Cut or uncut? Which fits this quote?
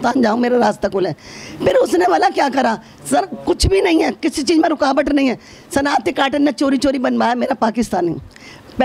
uncut